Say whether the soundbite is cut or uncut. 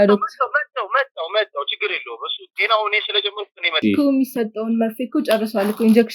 cut